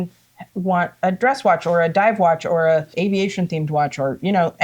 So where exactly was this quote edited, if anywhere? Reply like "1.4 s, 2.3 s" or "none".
2.9 s

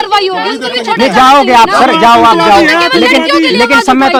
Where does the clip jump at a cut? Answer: none

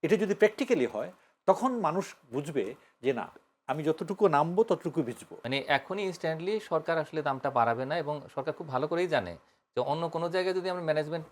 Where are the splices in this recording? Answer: 5.3 s

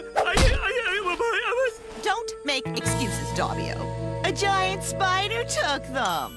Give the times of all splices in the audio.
none

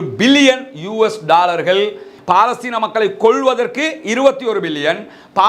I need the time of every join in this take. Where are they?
2.1 s

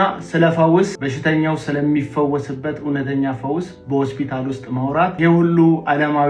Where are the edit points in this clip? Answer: 5.2 s

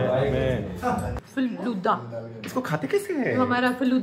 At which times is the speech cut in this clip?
1.1 s

